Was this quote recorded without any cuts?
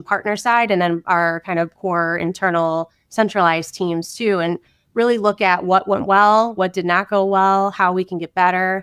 yes; 0 cuts

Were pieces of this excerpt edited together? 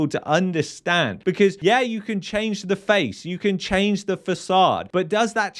yes; 1 cut; at 1.6 s

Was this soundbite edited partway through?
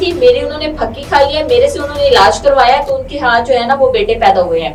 no; 0 cuts

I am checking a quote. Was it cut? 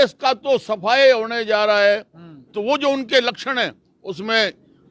no; 0 cuts

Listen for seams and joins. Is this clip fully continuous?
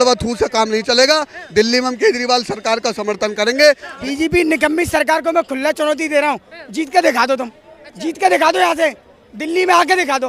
no; 1 cut; at 3.9 s

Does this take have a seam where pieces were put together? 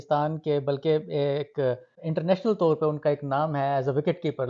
yes; 1 cut; at 1.9 s

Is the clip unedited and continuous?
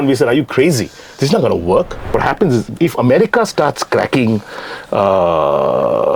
no; 1 cut; at 2.1 s

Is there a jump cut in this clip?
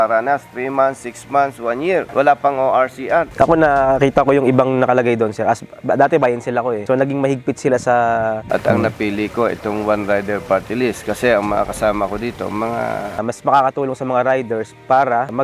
yes; 3 cuts; at 3.3 s, 8.4 s, 13.2 s

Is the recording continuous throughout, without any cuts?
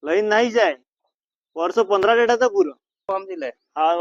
no; 1 cut; at 3.0 s

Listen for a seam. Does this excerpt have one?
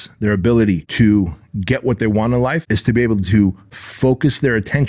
yes; 2 cuts; at 0.9 s, 2.7 s

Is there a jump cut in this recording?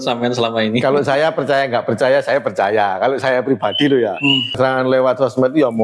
yes; 1 cut; at 4.5 s

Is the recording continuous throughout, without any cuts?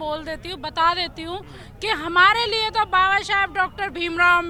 yes; 0 cuts

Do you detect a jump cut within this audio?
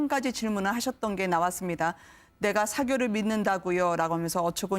no; 0 cuts

